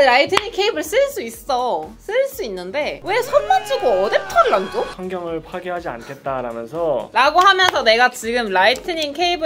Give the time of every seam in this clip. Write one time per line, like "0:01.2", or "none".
none